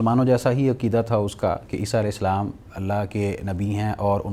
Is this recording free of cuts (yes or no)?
yes